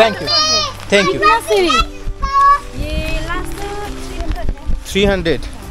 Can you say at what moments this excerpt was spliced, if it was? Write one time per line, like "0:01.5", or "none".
none